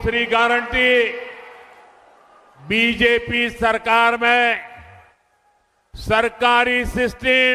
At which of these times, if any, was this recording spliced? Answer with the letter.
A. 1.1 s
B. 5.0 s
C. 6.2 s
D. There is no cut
C